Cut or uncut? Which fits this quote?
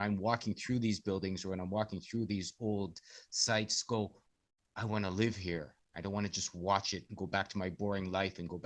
uncut